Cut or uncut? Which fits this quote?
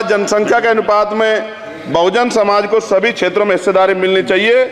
uncut